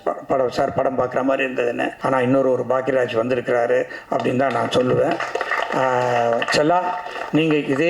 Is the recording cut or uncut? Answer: cut